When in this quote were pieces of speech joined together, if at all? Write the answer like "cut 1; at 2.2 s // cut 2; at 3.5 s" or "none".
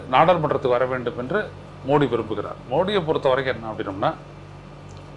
none

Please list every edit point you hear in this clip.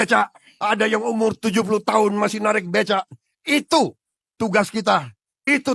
none

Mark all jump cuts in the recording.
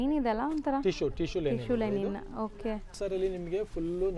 cut 1; at 2.9 s

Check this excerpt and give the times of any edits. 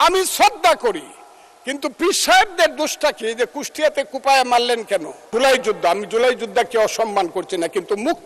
cut 1; at 5.3 s

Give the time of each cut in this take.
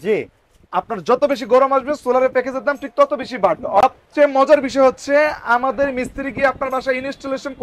cut 1; at 3.8 s

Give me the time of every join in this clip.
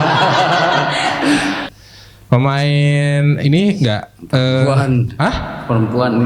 cut 1; at 1.7 s

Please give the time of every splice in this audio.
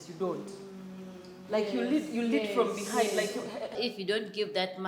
cut 1; at 3.8 s

